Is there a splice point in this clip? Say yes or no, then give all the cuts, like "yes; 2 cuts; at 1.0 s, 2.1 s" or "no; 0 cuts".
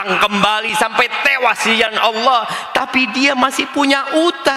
no; 0 cuts